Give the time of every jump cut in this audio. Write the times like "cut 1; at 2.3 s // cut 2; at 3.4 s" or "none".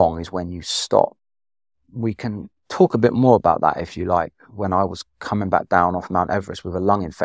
none